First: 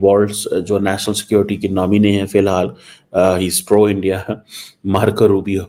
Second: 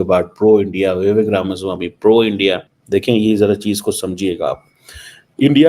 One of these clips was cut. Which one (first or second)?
second